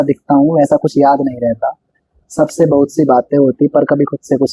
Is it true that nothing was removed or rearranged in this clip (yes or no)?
yes